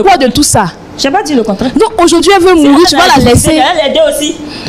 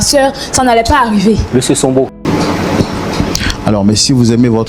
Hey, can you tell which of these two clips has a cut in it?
second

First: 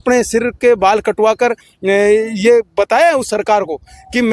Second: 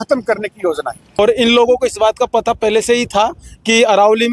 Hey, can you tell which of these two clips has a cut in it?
second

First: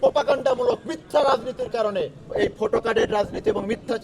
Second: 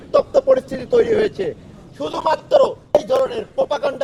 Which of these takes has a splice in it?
first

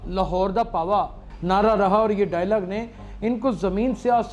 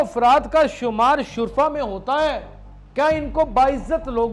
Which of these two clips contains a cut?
first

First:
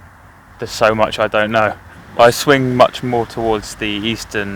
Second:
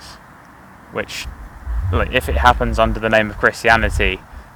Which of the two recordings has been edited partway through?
first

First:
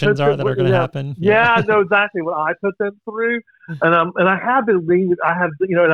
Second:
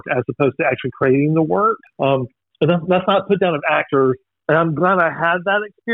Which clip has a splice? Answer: second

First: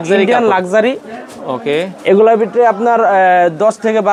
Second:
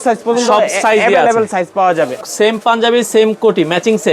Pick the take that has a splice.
second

